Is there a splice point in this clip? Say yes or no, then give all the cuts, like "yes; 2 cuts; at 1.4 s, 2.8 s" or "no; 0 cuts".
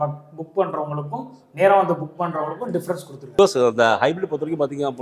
yes; 1 cut; at 3.4 s